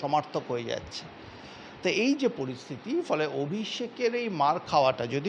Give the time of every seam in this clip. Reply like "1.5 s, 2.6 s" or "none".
none